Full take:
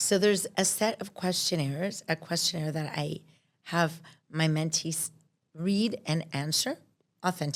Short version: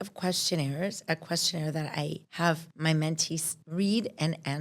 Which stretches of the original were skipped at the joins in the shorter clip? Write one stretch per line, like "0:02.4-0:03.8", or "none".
0:03.5-0:04.1
0:05.1-0:05.4